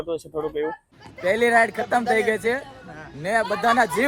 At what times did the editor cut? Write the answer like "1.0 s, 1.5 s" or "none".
1.1 s